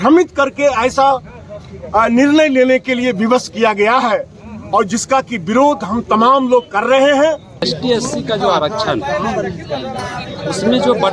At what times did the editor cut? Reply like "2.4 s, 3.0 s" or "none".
7.7 s